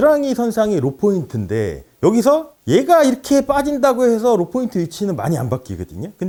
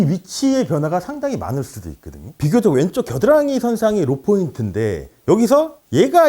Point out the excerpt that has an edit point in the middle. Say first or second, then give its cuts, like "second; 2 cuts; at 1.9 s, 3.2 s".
second; 1 cut; at 2.3 s